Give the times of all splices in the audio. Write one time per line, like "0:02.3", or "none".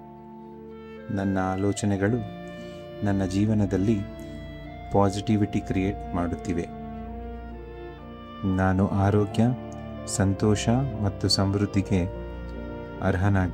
0:01.1
0:06.7
0:08.4